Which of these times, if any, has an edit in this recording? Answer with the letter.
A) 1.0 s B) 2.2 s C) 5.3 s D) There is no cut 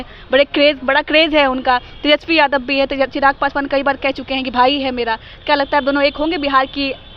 D